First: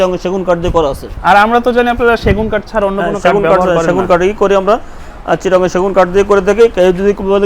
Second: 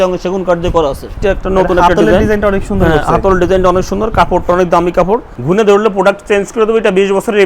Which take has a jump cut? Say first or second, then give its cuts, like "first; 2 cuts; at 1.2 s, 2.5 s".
second; 2 cuts; at 1.1 s, 5.3 s